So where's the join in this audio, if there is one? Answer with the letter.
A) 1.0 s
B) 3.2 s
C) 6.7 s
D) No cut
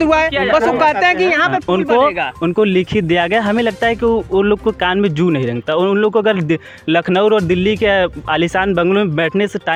D